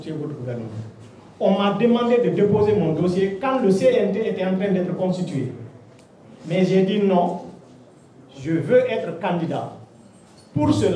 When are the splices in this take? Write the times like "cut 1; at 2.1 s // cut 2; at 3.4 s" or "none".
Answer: none